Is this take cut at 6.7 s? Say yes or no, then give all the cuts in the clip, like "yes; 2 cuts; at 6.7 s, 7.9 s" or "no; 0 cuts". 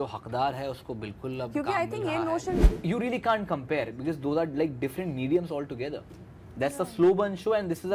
no; 1 cut; at 2.6 s